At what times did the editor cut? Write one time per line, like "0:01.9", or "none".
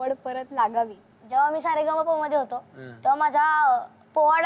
0:01.1